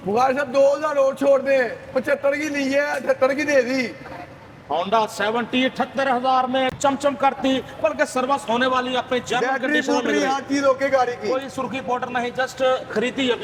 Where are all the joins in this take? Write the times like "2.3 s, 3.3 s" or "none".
none